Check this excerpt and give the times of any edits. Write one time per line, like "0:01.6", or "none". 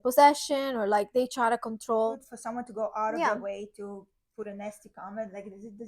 0:02.2